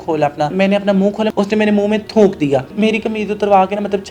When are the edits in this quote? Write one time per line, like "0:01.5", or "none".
0:01.0
0:02.7